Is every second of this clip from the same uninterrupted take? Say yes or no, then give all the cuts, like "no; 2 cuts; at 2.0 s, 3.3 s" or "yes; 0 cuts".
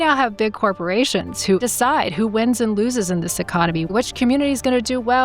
no; 2 cuts; at 1.6 s, 3.9 s